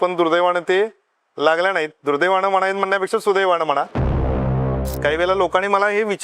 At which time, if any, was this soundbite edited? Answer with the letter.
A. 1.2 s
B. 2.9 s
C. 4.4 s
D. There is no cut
C